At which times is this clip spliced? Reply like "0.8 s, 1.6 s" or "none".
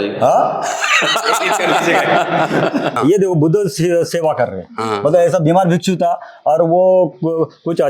2.9 s

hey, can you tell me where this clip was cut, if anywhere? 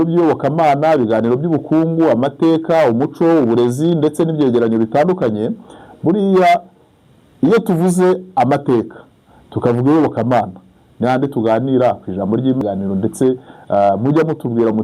12.6 s

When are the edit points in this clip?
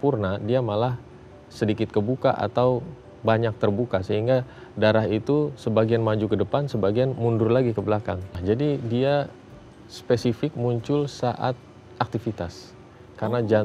8.4 s

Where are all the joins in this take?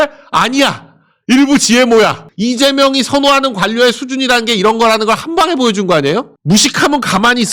2.2 s, 6.4 s

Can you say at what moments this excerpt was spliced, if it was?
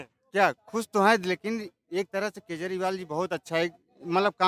none

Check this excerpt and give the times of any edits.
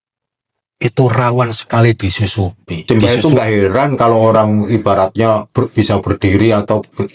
2.8 s

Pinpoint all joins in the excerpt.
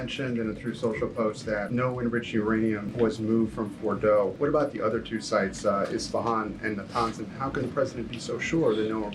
1.7 s, 2.9 s, 4.3 s

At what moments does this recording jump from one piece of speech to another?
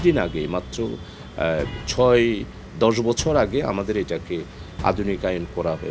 none

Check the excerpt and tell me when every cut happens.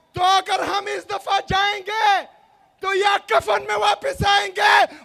none

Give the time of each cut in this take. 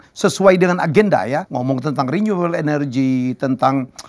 1.5 s

